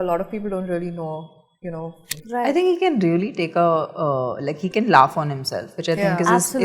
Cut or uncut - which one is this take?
cut